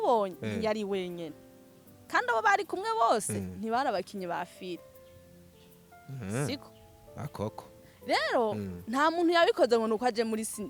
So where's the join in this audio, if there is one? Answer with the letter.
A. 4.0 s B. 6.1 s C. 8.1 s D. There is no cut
D